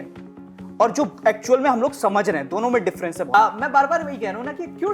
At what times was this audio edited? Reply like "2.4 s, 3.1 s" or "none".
3.3 s